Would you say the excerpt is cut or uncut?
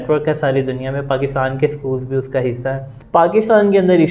cut